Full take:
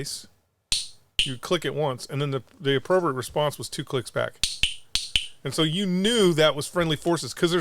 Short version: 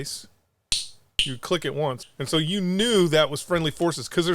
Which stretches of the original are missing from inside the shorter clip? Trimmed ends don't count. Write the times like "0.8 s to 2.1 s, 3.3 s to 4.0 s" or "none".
2.0 s to 5.3 s